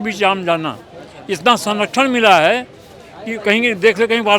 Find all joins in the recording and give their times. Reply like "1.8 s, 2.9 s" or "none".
none